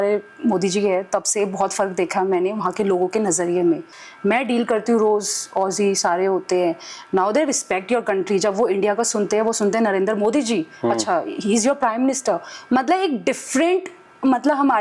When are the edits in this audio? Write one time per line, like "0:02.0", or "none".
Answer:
0:03.9